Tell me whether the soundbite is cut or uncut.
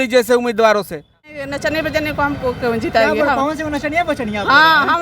cut